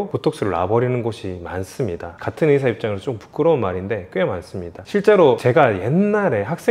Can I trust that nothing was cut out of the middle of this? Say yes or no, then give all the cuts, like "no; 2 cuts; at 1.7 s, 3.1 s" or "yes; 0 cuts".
yes; 0 cuts